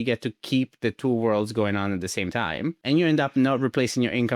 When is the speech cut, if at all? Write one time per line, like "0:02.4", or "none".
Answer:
0:02.8